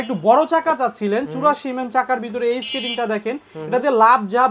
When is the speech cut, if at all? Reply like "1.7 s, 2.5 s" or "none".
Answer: none